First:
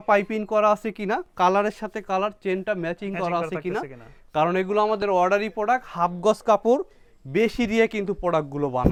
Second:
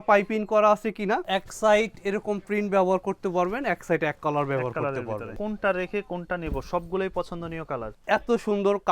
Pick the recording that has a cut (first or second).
second